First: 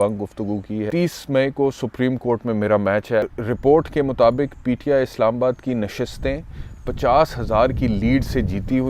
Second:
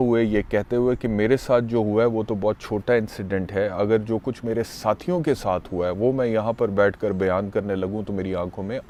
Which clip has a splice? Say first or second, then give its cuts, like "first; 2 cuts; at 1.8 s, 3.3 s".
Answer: first; 2 cuts; at 0.9 s, 3.3 s